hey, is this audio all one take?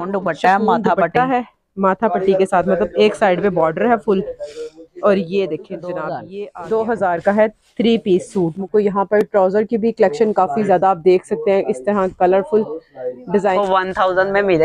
no; 3 cuts; at 6.3 s, 8.7 s, 13.6 s

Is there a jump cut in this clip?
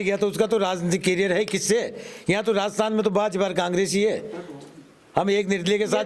no; 0 cuts

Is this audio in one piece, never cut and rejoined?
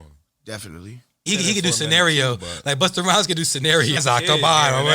no; 2 cuts; at 1.2 s, 4.0 s

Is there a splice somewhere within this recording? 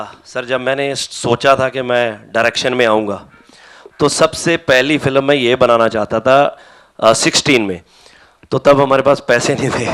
no; 0 cuts

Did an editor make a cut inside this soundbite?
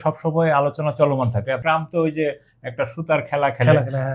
yes; 1 cut; at 1.6 s

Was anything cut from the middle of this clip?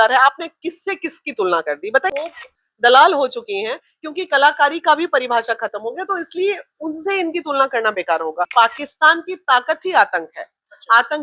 yes; 2 cuts; at 2.1 s, 8.5 s

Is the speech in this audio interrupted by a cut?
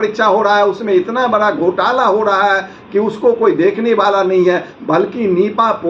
no; 0 cuts

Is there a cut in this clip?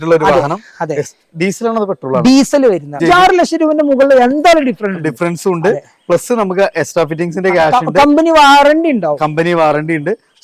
yes; 1 cut; at 3.0 s

